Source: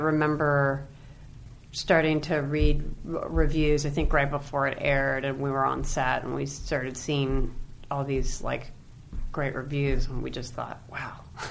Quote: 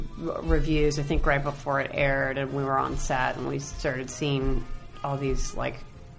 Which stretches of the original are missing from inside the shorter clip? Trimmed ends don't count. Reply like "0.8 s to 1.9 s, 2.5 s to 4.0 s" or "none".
none